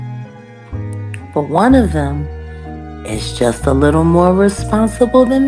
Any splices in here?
yes; 1 cut; at 1.3 s

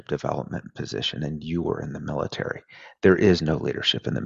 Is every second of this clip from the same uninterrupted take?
yes; 0 cuts

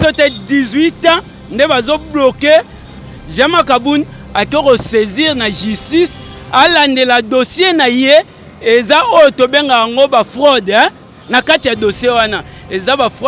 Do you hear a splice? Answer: yes; 1 cut; at 2.8 s

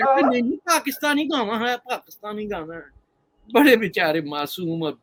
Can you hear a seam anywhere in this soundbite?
no; 0 cuts

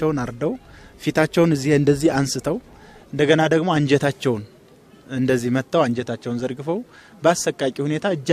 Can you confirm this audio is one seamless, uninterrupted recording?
yes; 0 cuts

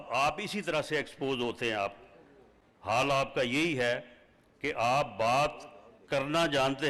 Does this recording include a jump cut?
no; 0 cuts

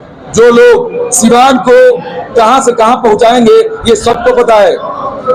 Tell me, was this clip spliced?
no; 0 cuts

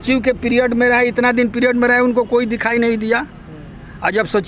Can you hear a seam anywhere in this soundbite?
no; 0 cuts

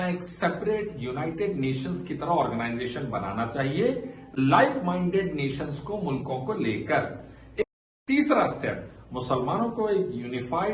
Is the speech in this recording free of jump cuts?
no; 1 cut; at 7.6 s

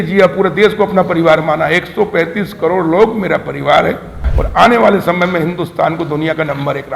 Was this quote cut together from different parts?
yes; 1 cut; at 4.3 s

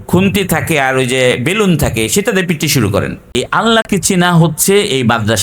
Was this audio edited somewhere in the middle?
yes; 1 cut; at 3.2 s

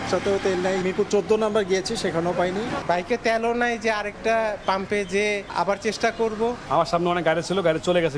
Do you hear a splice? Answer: no; 0 cuts

